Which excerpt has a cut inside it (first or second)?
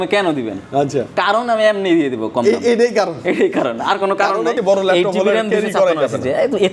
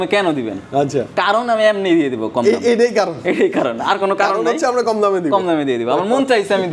first